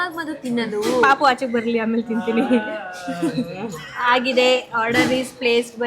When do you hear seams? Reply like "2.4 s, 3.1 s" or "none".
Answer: none